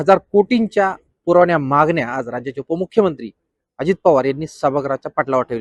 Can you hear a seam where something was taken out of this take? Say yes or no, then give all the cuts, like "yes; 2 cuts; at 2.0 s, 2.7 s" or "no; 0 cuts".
no; 0 cuts